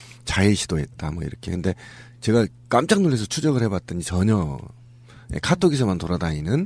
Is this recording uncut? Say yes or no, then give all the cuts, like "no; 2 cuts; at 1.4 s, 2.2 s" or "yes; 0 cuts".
yes; 0 cuts